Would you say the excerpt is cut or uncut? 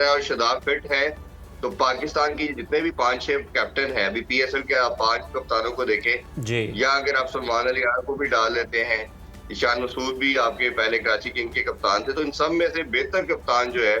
uncut